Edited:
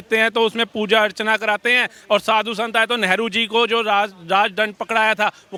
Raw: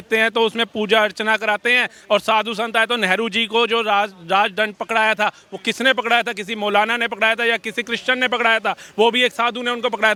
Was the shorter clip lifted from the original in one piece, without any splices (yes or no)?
yes